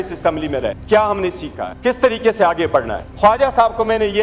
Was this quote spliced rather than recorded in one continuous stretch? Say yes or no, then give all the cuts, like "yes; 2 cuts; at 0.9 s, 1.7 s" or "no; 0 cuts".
yes; 3 cuts; at 0.8 s, 1.7 s, 3.0 s